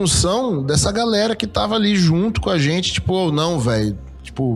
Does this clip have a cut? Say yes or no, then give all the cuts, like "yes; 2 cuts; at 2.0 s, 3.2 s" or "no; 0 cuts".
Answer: no; 0 cuts